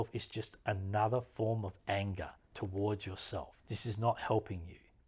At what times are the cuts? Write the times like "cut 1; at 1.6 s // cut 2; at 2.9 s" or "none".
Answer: none